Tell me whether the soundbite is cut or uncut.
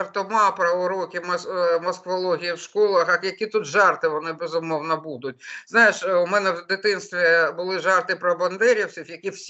uncut